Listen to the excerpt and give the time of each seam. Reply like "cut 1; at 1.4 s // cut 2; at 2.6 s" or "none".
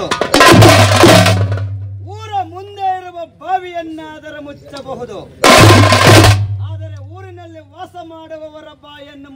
none